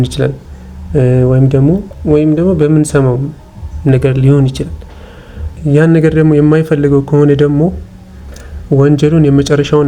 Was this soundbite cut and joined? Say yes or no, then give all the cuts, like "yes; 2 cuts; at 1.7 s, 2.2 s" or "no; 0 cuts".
yes; 2 cuts; at 1.9 s, 5.5 s